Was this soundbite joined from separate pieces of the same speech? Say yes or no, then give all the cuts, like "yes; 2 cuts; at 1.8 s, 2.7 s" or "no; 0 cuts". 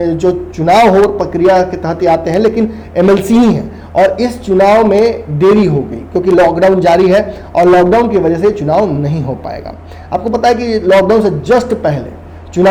no; 0 cuts